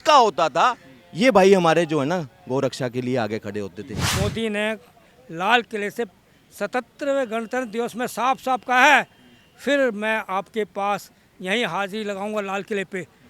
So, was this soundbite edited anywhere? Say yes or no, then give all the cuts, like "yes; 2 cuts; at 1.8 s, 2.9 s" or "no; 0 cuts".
yes; 1 cut; at 4.0 s